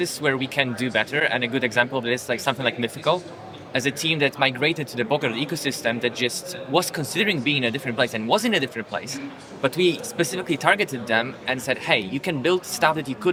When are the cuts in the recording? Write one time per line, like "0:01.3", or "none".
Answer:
none